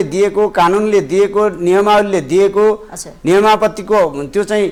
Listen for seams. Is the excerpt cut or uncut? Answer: uncut